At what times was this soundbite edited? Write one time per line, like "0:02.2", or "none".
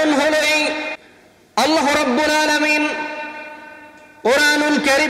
0:00.9